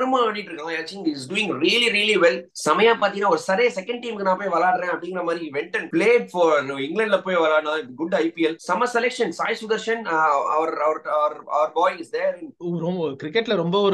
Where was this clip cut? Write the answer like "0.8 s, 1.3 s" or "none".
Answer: none